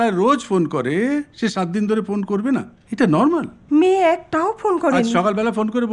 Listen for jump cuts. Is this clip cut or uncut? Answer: cut